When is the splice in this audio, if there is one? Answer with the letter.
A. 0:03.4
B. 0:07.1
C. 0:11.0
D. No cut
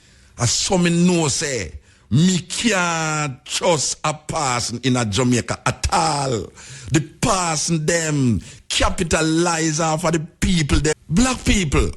C